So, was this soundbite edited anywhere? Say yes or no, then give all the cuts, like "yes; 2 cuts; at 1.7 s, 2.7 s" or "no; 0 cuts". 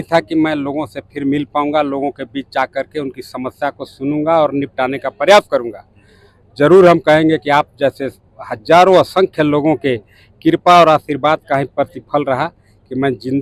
no; 0 cuts